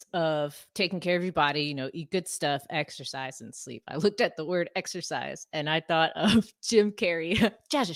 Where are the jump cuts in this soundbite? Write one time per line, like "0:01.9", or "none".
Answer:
none